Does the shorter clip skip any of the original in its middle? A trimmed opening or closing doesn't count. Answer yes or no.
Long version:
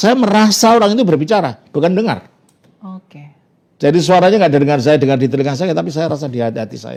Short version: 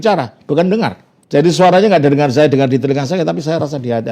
yes